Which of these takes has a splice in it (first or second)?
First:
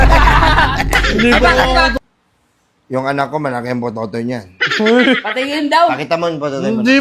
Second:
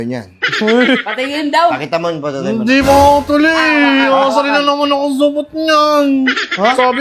first